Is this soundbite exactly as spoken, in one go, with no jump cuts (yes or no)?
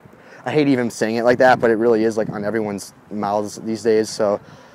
yes